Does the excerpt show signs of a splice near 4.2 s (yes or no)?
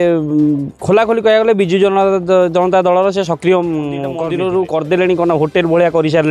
yes